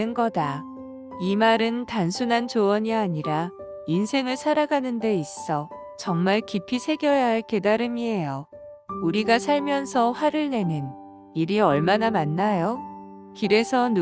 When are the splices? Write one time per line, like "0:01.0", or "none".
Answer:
0:00.9